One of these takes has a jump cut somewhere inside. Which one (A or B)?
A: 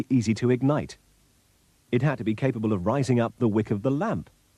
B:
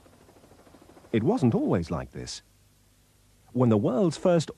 B